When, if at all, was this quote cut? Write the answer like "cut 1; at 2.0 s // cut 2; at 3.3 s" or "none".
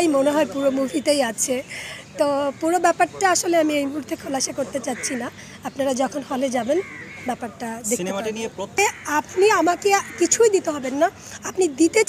cut 1; at 8.8 s